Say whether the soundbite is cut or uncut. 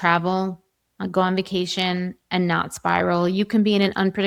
uncut